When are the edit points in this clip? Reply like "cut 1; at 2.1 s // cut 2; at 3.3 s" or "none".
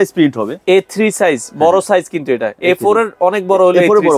none

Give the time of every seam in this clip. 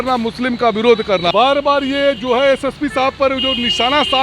cut 1; at 1.3 s

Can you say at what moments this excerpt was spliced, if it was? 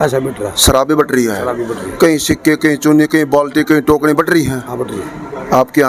none

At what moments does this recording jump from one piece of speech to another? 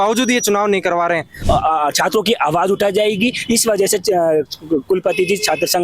cut 1; at 1.3 s

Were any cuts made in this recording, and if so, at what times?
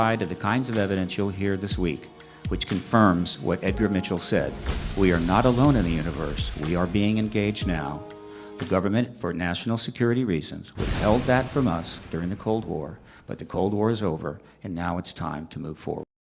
none

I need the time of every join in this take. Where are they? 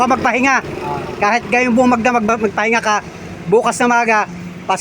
cut 1; at 2.3 s

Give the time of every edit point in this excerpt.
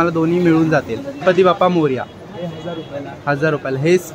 cut 1; at 1.2 s

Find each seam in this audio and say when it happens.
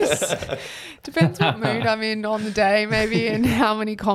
none

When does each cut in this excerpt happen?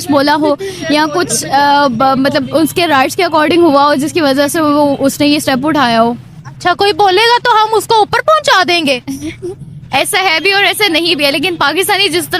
none

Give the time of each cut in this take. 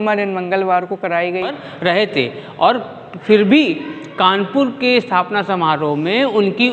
cut 1; at 1.6 s

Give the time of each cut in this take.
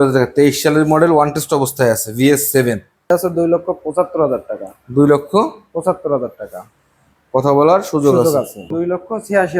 cut 1; at 3.1 s // cut 2; at 8.7 s

